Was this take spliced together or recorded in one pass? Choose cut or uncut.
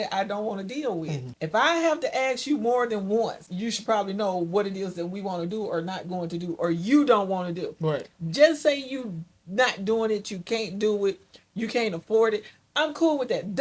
cut